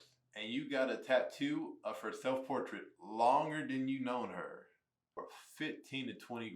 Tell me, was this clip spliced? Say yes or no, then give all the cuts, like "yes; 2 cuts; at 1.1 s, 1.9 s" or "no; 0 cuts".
yes; 1 cut; at 5.2 s